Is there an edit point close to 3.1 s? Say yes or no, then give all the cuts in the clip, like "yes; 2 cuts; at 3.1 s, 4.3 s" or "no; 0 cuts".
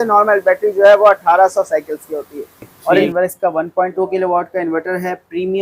yes; 1 cut; at 3.1 s